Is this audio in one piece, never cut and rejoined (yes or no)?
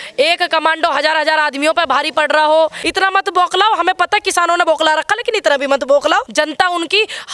no